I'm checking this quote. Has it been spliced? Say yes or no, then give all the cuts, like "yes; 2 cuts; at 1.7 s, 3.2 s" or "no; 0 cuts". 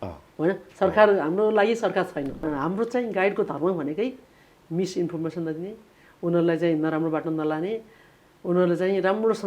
yes; 1 cut; at 2.4 s